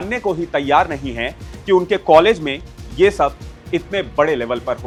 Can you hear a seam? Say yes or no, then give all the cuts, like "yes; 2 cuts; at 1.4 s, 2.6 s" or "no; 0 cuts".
no; 0 cuts